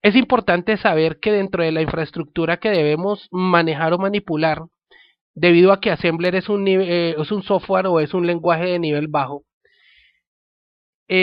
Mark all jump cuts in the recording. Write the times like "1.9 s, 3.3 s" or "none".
none